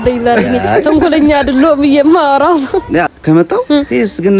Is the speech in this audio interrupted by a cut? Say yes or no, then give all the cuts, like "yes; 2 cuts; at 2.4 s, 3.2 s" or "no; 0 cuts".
yes; 1 cut; at 3.1 s